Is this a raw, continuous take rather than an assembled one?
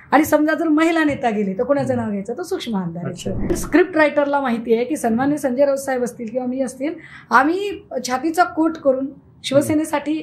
no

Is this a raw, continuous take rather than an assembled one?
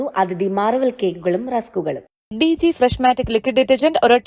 yes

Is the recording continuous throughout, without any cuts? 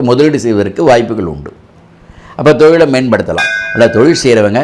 no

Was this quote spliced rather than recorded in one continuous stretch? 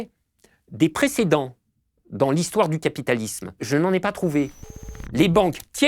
yes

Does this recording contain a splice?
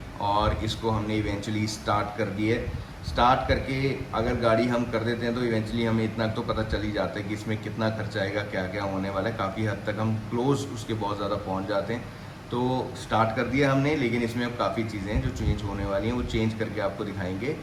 no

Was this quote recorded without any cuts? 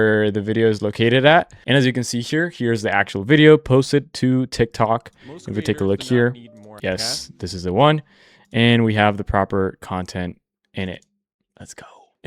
no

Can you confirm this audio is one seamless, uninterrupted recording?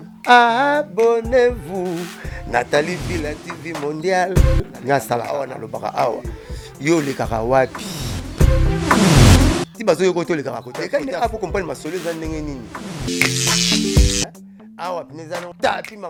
yes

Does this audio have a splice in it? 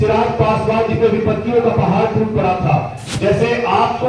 yes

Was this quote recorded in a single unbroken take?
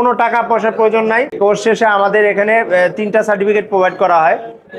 no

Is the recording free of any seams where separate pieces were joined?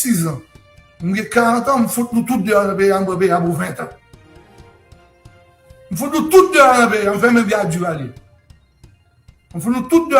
yes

